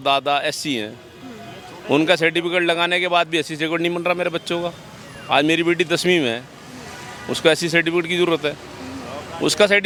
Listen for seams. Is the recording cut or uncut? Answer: uncut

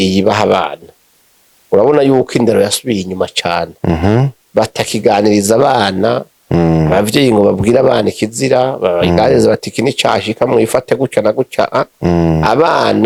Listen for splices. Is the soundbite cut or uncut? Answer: uncut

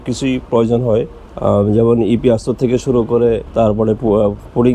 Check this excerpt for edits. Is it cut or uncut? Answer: uncut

